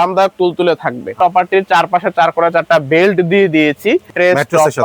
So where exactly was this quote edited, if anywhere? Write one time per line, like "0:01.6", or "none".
0:01.2
0:04.1